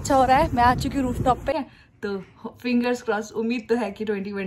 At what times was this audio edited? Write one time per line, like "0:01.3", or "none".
0:01.5